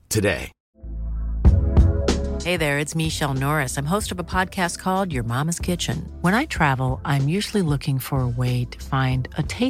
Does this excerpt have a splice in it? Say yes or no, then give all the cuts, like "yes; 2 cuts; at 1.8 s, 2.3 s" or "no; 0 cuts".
no; 0 cuts